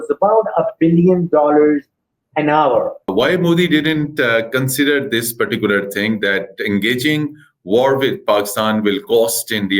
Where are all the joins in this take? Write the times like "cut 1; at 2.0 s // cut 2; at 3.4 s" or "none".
cut 1; at 3.1 s